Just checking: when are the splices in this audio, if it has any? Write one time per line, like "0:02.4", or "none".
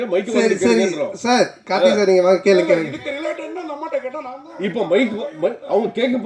0:04.5